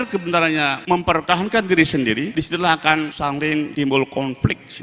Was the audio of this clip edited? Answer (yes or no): yes